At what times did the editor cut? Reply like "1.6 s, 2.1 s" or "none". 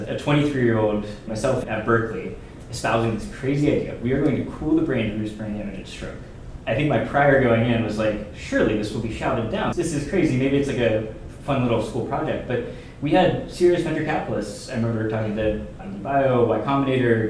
none

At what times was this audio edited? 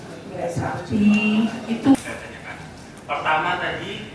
1.9 s

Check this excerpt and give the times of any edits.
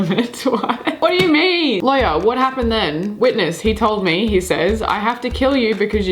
1.0 s, 1.8 s

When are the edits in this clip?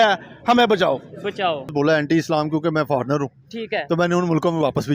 1.6 s

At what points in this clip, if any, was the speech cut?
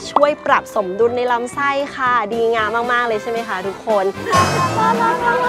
4.2 s

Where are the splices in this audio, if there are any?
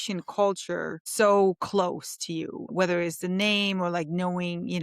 1.0 s, 2.6 s

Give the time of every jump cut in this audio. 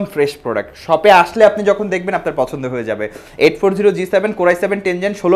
none

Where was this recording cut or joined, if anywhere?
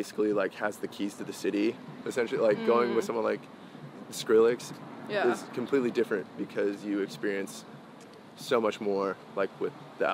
none

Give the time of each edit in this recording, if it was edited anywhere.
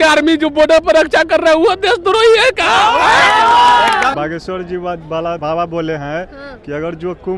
4.1 s, 5.4 s

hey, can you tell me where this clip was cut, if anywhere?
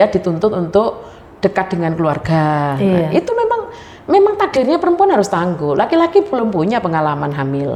none

